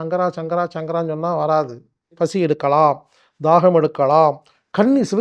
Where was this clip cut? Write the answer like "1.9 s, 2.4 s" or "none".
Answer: 2.1 s